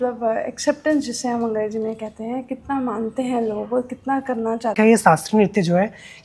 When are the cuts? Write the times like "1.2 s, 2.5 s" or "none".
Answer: 4.7 s